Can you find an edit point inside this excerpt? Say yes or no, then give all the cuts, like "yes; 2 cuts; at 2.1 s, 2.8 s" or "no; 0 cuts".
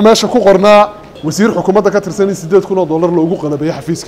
yes; 1 cut; at 1.1 s